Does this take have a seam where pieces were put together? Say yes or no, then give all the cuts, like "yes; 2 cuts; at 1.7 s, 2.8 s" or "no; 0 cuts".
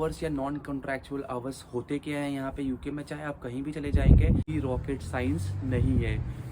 yes; 1 cut; at 4.5 s